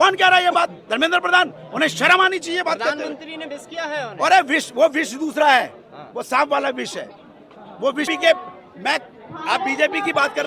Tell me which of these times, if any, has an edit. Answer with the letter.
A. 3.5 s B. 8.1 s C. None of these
B